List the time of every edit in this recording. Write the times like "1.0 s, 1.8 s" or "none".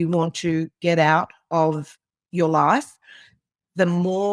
none